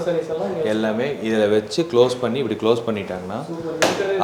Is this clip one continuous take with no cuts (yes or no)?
yes